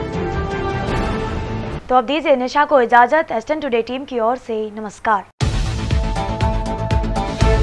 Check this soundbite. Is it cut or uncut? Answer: uncut